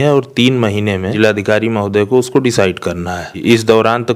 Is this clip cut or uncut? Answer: cut